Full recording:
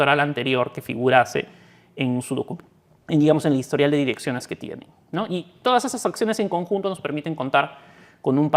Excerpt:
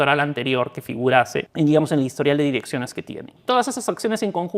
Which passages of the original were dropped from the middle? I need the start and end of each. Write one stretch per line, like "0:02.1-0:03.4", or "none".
0:01.5-0:03.0
0:04.9-0:05.5